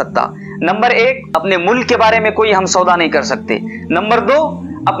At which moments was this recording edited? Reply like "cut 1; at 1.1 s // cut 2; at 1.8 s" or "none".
cut 1; at 1.2 s